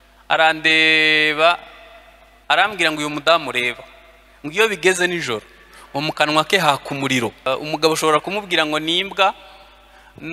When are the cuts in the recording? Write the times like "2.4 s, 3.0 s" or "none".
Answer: 7.5 s